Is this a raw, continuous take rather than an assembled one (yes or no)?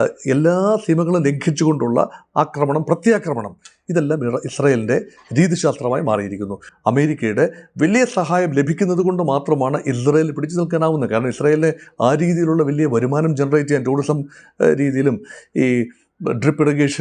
no